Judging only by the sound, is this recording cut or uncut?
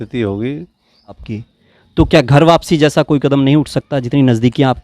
cut